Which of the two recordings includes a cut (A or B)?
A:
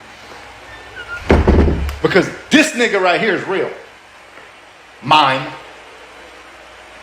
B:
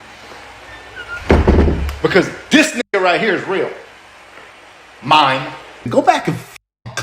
B